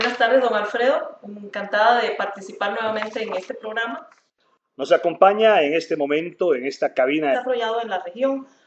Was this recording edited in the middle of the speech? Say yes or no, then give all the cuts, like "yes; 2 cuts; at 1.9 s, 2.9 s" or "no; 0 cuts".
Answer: no; 0 cuts